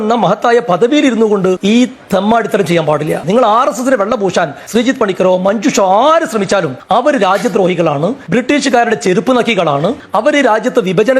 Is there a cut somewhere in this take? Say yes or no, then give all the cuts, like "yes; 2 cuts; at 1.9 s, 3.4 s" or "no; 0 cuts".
yes; 4 cuts; at 1.6 s, 4.6 s, 6.8 s, 8.2 s